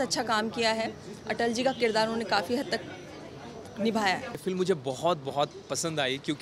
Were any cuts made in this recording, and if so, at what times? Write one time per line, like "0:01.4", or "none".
none